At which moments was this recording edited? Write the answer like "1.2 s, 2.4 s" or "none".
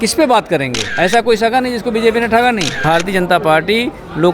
0.9 s, 2.8 s